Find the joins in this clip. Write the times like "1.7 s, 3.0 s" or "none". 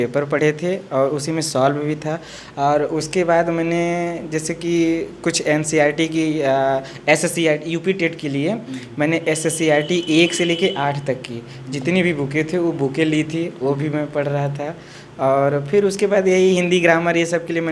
none